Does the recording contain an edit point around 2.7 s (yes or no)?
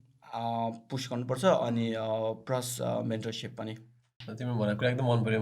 no